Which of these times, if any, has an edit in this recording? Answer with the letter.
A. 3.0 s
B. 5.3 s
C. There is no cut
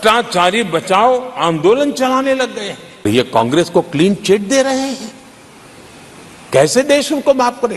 A